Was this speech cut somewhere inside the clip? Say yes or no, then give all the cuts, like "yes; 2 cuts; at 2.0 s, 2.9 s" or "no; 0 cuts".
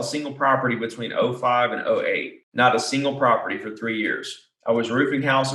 no; 0 cuts